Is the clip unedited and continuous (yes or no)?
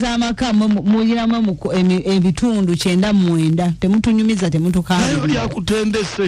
yes